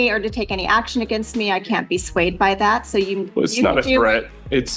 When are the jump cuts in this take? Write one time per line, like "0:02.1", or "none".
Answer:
none